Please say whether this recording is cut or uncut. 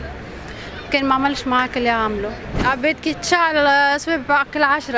cut